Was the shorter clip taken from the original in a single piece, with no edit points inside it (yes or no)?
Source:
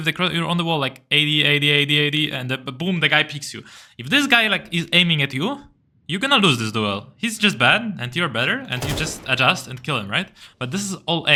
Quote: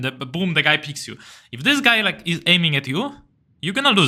yes